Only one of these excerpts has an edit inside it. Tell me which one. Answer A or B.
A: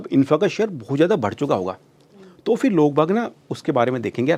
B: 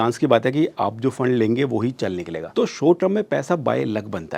B